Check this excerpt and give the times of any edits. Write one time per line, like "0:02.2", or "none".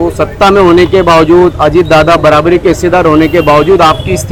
none